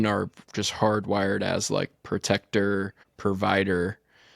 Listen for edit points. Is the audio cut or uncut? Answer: cut